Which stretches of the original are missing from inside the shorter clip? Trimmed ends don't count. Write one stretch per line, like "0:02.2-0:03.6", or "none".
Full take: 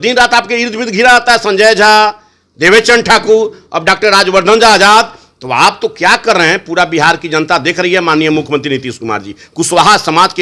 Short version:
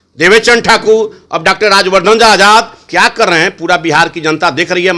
0:05.2-0:05.9